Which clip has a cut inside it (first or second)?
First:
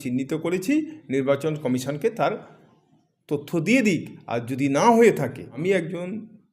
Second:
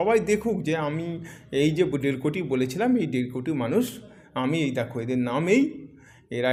first